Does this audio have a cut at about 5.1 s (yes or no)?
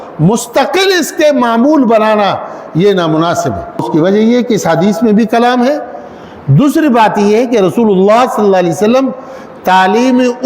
no